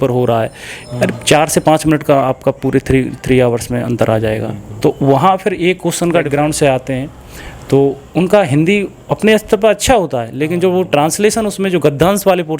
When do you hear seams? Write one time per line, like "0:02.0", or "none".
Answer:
0:06.3